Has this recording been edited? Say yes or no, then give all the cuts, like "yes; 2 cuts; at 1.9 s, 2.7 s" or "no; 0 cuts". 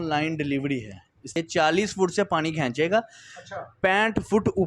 yes; 1 cut; at 1.3 s